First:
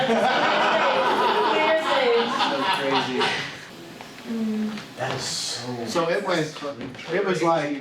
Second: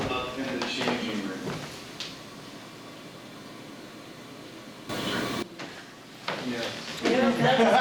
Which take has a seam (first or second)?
first